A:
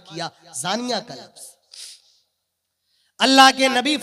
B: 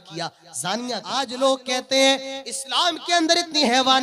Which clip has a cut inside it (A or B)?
B